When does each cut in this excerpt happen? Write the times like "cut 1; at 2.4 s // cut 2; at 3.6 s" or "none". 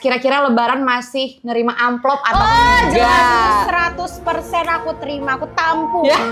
none